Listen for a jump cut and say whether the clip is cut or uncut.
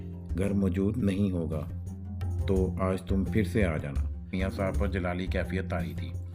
cut